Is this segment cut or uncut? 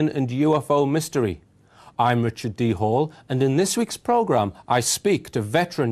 cut